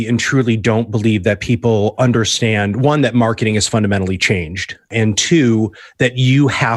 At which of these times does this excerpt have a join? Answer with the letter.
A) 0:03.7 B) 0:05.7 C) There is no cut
C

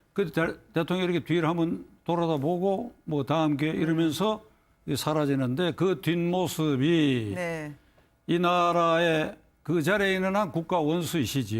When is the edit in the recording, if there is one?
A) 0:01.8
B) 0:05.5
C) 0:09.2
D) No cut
A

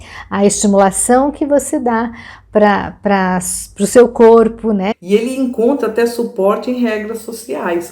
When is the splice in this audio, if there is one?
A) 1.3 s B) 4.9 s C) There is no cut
B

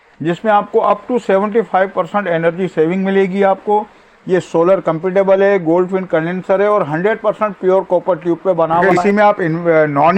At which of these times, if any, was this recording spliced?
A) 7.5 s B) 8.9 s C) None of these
B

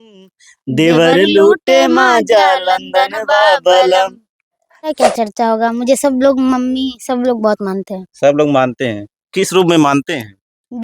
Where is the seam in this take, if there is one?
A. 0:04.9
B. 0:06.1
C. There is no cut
A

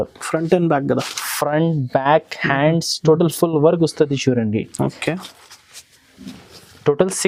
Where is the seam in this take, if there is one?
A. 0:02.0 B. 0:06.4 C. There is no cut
C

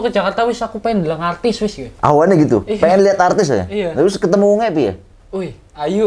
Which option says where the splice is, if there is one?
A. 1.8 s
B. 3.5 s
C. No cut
A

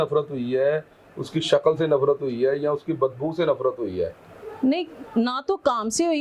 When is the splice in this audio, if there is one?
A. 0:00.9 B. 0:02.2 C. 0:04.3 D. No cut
D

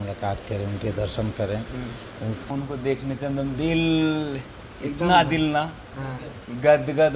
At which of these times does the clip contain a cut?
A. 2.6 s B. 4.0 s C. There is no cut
A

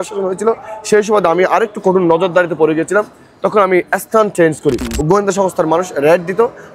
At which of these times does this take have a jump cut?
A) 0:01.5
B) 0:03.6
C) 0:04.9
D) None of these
C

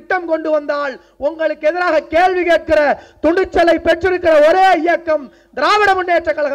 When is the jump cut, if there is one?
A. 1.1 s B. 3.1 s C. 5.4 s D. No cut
D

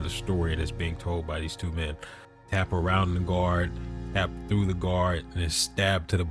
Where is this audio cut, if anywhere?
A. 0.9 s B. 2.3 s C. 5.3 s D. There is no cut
B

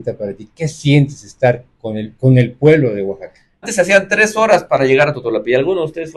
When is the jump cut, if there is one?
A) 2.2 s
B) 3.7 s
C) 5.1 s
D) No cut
B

